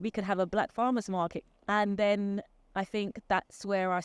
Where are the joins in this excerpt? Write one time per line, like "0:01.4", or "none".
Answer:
0:01.5